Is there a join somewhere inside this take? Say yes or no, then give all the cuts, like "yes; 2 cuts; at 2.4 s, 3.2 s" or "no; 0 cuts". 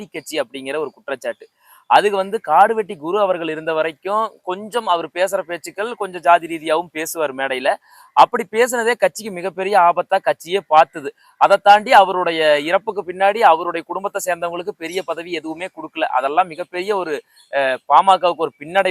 no; 0 cuts